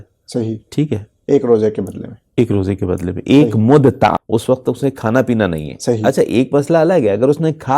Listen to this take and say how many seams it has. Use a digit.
1